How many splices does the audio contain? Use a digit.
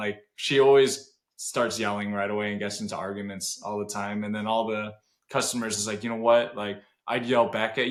0